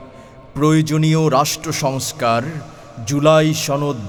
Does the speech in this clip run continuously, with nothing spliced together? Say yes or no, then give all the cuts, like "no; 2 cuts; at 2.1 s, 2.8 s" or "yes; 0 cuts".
yes; 0 cuts